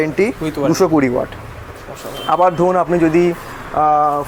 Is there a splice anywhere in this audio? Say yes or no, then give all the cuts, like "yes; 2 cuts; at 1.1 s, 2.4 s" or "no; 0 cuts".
no; 0 cuts